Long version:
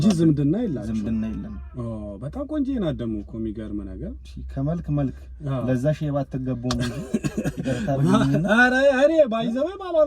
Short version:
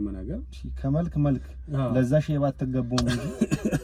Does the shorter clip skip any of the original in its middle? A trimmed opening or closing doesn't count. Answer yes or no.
no